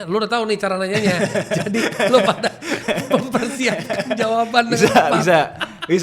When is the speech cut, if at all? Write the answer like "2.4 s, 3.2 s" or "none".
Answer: none